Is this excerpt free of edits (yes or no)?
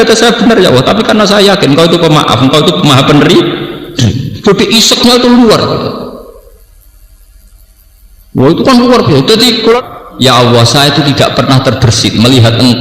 no